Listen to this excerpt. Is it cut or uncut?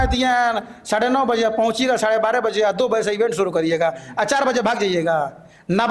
uncut